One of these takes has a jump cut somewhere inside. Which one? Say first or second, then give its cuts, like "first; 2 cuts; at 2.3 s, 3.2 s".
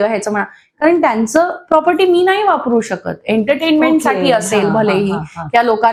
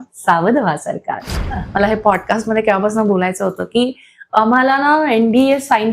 second; 1 cut; at 1.5 s